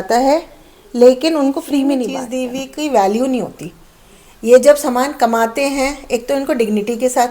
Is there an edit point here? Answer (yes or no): yes